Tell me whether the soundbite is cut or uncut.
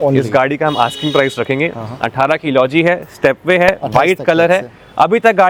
uncut